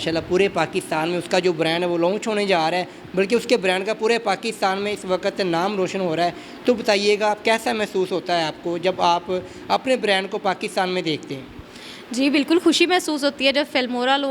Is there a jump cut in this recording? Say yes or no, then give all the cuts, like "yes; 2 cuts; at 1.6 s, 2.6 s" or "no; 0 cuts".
no; 0 cuts